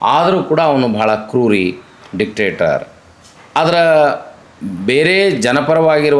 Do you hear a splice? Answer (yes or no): no